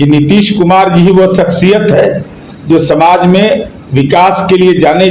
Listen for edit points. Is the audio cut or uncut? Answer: uncut